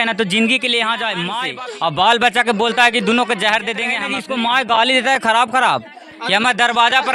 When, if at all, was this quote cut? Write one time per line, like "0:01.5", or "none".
0:01.4
0:04.1